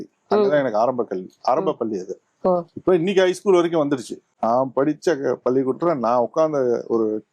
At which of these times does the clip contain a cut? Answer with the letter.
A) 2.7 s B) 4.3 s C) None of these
B